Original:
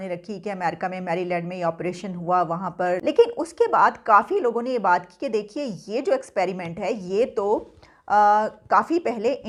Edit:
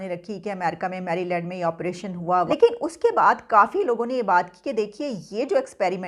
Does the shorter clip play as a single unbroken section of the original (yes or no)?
no